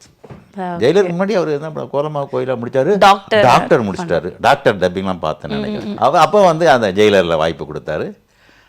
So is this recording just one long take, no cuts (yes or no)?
no